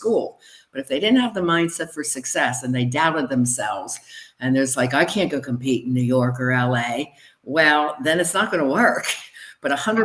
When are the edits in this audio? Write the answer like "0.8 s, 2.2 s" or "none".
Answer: none